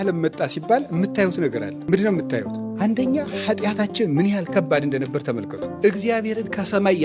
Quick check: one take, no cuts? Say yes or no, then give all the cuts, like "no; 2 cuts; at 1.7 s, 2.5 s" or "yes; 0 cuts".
no; 3 cuts; at 1.7 s, 2.6 s, 5.7 s